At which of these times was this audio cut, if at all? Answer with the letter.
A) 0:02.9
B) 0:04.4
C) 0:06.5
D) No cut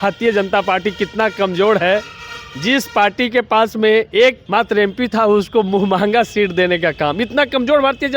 B